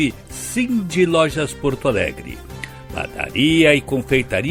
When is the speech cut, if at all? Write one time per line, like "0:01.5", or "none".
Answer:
none

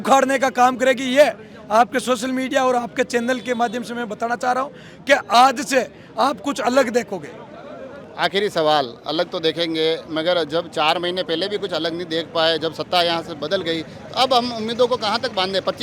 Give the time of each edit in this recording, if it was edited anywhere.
none

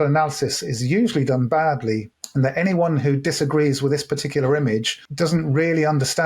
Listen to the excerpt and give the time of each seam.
0:02.2

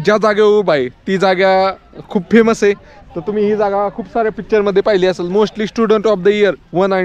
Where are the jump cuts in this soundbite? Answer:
none

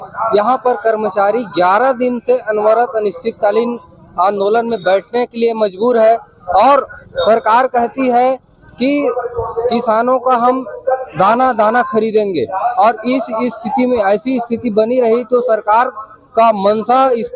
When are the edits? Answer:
none

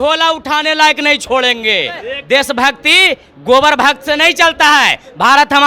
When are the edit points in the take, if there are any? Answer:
0:02.2

